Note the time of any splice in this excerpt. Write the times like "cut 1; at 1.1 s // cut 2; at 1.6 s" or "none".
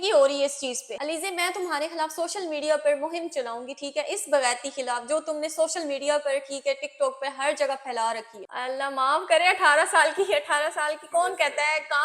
cut 1; at 8.3 s